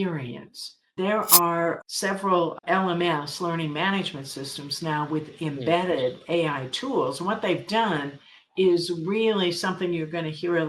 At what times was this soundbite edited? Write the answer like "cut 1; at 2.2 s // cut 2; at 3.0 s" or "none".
cut 1; at 0.9 s // cut 2; at 1.8 s // cut 3; at 2.6 s

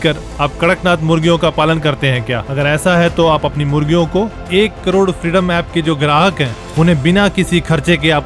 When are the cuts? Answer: none

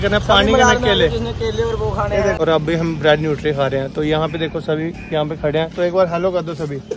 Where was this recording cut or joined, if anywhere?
cut 1; at 2.4 s

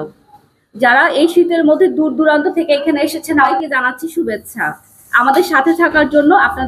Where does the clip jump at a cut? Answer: cut 1; at 3.5 s

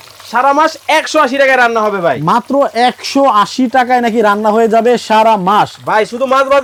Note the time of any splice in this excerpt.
none

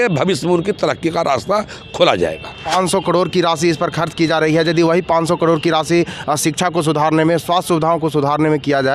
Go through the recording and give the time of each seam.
cut 1; at 2.6 s

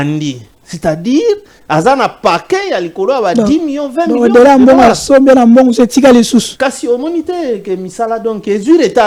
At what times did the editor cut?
none

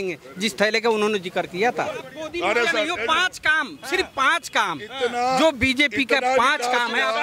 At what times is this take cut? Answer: cut 1; at 2.1 s

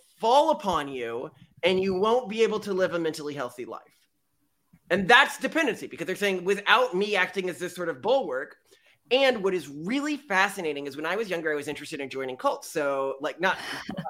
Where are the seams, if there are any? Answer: none

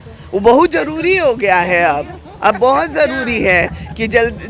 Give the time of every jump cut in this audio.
none

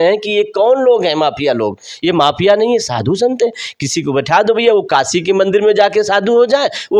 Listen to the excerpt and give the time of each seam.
none

